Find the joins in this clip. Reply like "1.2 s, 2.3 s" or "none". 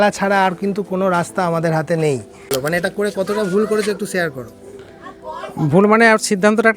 2.5 s